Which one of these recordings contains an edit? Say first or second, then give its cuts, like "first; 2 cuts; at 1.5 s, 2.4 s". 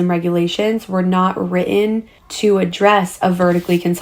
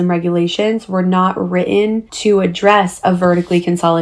second; 1 cut; at 2.1 s